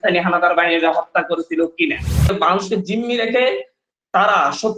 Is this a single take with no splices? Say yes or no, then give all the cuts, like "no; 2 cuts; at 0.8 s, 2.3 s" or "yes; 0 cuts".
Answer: no; 1 cut; at 2.3 s